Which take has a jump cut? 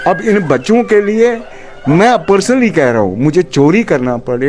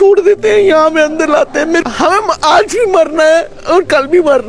second; 1 cut; at 1.8 s

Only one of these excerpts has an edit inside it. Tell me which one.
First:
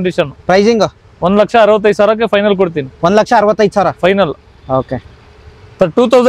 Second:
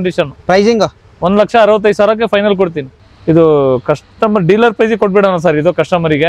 second; 1 cut; at 2.8 s

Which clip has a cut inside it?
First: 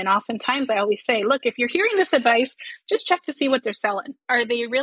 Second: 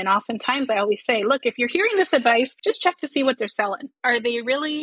second; 1 cut; at 2.5 s

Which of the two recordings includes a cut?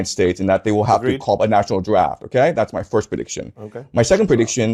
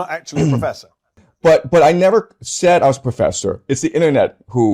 second; 1 cut; at 1.2 s

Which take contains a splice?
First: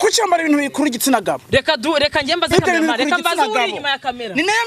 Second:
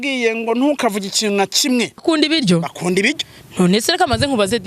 second; 1 cut; at 2.0 s

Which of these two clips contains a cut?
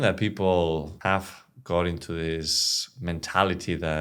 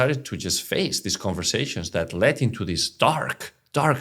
first; 1 cut; at 0.9 s

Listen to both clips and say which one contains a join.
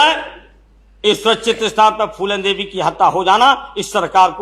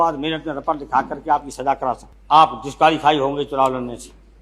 second; 1 cut; at 2.1 s

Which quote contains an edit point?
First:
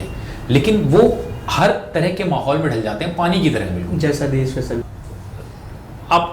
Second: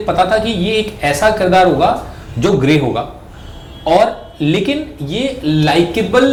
first; 1 cut; at 4.9 s

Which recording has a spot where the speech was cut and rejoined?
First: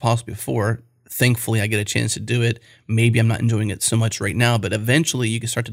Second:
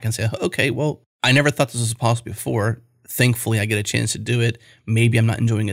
second; 1 cut; at 1.1 s

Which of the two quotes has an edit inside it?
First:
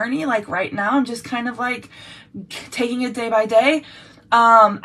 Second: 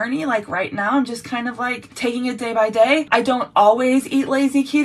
second; 2 cuts; at 1.9 s, 3.1 s

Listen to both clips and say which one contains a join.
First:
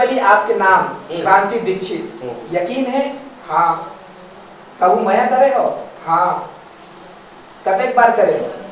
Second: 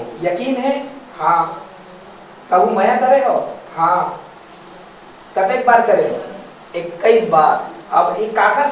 second; 1 cut; at 7.8 s

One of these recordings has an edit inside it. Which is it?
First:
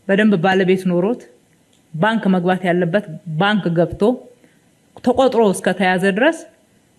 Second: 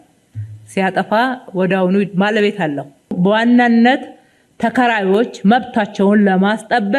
second; 1 cut; at 3.1 s

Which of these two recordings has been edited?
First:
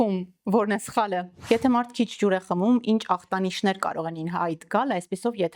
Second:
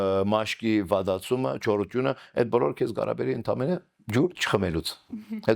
first; 1 cut; at 1.3 s

